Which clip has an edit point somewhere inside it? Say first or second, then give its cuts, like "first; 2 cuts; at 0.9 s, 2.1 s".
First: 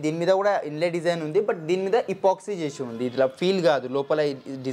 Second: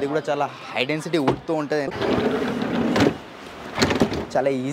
second; 1 cut; at 1.9 s